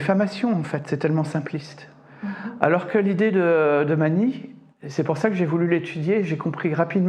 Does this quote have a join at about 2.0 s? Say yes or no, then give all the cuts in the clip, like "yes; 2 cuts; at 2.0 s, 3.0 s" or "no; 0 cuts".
no; 0 cuts